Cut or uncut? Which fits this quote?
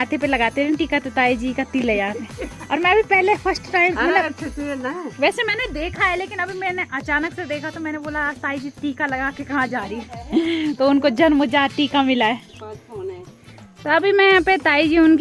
uncut